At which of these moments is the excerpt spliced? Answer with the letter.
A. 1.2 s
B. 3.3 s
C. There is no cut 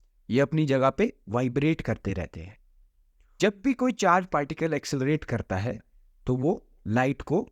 B